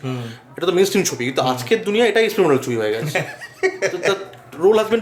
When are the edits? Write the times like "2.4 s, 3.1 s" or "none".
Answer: none